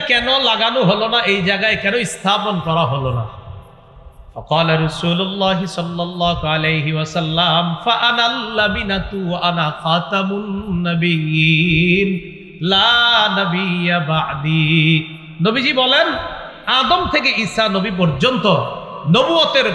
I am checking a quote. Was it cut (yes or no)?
no